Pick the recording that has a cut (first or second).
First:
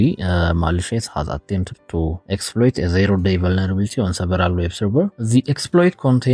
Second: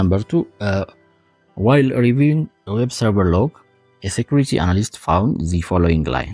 first